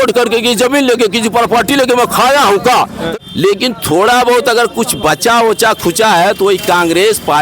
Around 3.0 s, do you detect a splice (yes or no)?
yes